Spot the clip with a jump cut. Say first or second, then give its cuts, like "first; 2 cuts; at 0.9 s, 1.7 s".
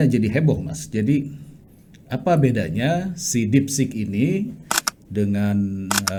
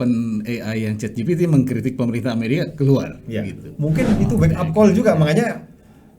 second; 1 cut; at 3.7 s